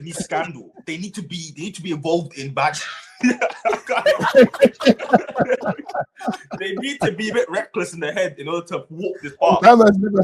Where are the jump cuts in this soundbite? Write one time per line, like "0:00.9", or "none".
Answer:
none